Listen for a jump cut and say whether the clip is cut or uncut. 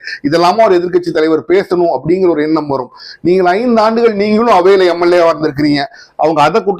uncut